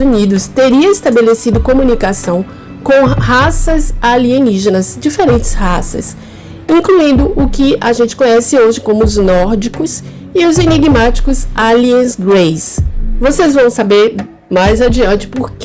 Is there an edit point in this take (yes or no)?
no